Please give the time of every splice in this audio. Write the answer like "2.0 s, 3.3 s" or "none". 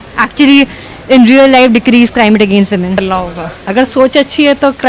3.0 s

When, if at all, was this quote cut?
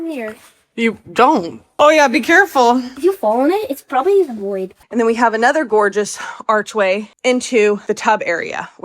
1.8 s, 2.9 s, 4.8 s, 7.1 s, 7.8 s

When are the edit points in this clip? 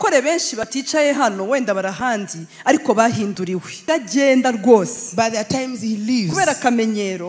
3.8 s

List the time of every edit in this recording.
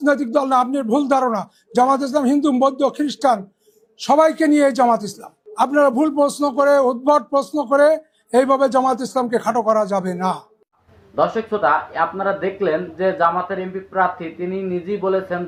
none

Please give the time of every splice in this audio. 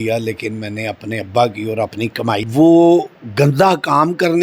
2.4 s

